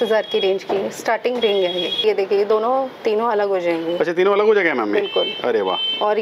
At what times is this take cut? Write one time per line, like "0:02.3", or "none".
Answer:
0:02.0